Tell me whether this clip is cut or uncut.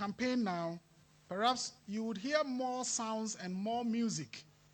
uncut